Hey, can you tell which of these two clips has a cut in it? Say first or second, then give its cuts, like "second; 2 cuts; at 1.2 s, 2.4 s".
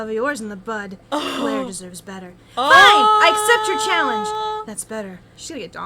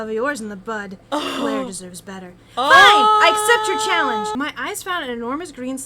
second; 1 cut; at 4.3 s